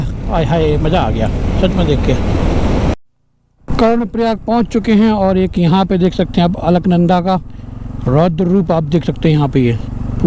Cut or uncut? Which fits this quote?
cut